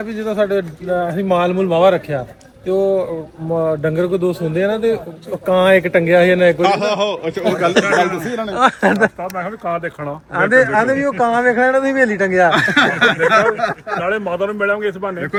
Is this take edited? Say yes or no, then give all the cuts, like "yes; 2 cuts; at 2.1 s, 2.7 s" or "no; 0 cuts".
no; 0 cuts